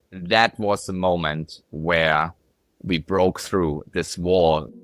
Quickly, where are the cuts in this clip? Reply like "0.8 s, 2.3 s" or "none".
none